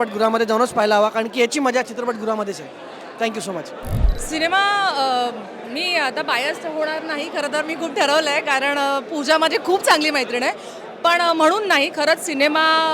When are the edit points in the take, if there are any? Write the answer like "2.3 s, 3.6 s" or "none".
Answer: none